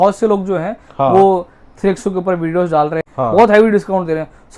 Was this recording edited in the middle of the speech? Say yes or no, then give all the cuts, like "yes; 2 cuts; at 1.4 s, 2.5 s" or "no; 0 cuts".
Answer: yes; 1 cut; at 3.1 s